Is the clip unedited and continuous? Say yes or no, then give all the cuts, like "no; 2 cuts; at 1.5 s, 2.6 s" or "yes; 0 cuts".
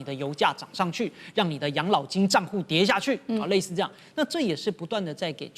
yes; 0 cuts